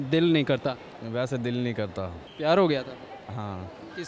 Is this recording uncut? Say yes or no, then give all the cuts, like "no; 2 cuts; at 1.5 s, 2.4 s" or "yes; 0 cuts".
no; 1 cut; at 2.2 s